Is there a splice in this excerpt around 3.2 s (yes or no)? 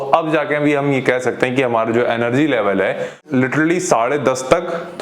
yes